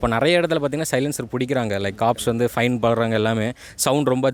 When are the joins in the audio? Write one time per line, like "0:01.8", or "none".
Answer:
none